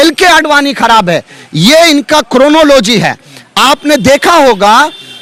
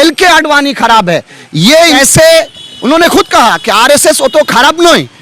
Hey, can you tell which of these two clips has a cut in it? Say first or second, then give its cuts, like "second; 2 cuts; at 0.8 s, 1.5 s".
second; 1 cut; at 2.0 s